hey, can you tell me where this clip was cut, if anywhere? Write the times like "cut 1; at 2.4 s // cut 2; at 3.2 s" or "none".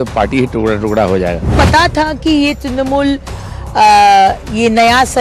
cut 1; at 1.5 s